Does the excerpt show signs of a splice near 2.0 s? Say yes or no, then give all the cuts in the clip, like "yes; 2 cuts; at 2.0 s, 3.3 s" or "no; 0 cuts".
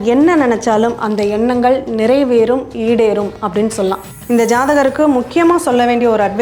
no; 1 cut; at 4.2 s